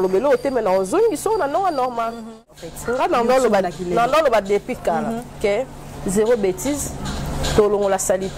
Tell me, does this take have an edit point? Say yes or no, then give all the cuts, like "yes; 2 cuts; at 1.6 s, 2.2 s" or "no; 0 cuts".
yes; 1 cut; at 2.5 s